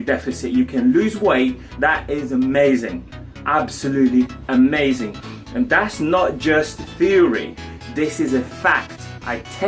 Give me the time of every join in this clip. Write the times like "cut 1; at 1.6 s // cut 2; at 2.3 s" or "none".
cut 1; at 1.7 s